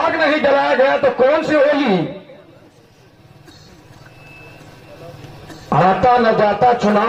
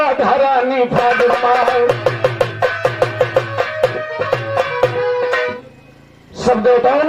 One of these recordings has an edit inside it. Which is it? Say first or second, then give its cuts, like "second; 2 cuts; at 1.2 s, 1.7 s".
second; 1 cut; at 5.5 s